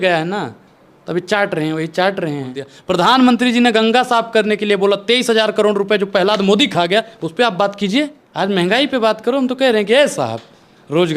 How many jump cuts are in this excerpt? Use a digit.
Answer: 2